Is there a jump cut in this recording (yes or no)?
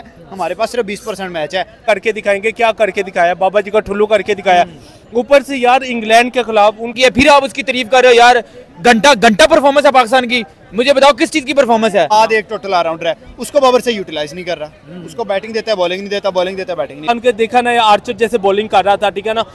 yes